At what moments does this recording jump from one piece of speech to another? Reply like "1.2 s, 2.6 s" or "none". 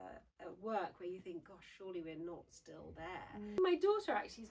3.6 s